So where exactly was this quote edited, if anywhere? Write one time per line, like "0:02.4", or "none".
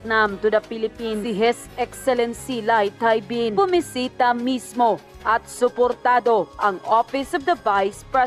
none